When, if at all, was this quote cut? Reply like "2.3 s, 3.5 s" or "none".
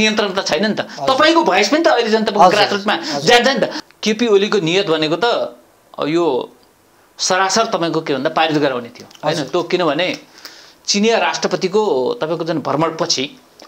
3.8 s